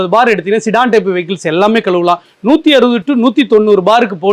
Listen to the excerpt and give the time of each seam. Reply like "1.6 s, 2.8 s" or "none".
none

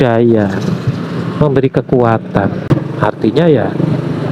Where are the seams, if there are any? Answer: 2.6 s

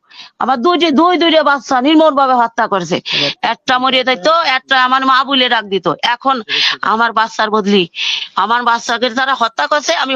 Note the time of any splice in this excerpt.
none

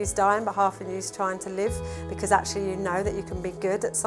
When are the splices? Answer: none

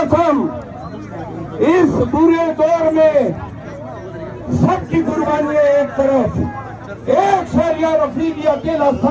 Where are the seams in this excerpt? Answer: none

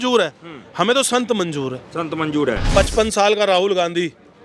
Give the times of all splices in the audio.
2.6 s

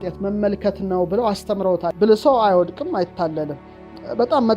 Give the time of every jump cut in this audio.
1.9 s

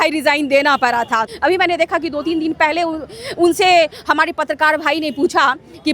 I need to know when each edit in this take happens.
1.2 s

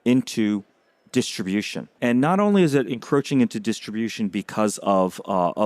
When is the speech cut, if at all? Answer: 1.9 s

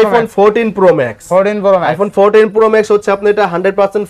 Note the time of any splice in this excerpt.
none

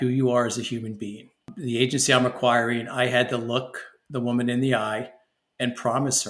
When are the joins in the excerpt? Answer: 1.5 s

